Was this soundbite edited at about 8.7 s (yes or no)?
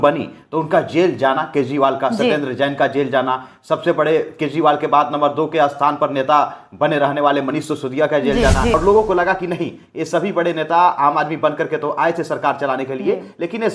yes